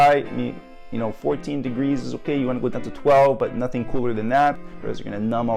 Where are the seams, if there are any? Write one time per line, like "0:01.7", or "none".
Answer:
0:04.6

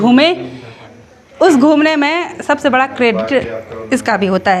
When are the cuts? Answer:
none

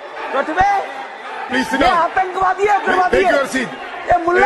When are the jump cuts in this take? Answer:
0:01.5

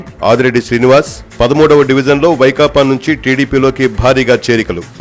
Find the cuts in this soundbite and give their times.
none

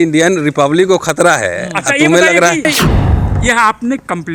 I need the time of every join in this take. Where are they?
none

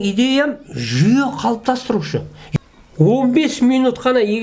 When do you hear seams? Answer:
0:02.4

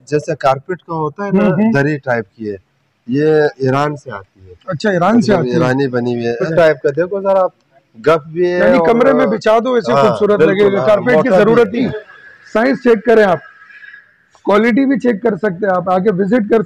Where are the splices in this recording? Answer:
0:06.4
0:11.8

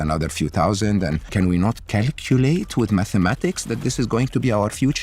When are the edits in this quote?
none

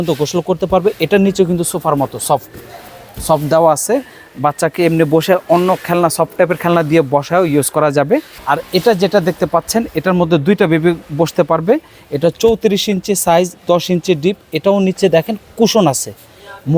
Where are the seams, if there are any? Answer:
0:08.3

